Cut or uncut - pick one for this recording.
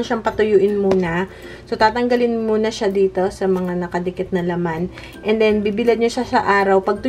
uncut